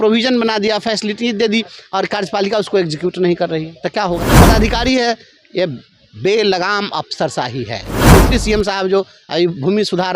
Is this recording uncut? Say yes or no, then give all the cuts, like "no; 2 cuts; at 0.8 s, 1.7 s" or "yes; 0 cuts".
no; 2 cuts; at 4.4 s, 7.9 s